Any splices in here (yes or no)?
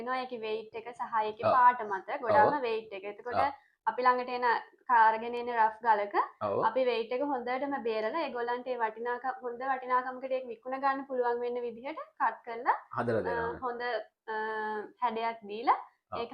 no